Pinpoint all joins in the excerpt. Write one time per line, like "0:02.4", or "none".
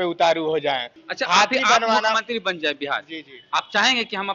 0:01.0